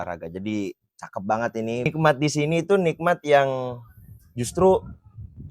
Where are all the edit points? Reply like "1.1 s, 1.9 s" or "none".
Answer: 1.9 s